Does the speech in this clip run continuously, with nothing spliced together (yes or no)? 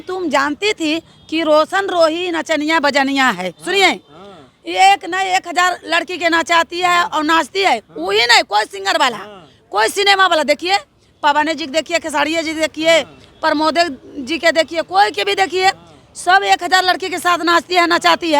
yes